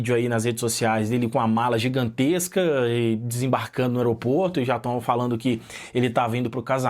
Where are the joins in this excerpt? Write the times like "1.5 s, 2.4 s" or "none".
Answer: none